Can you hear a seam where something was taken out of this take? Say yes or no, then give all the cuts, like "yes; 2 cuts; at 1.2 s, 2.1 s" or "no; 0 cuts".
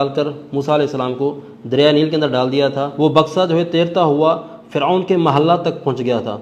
yes; 1 cut; at 2.9 s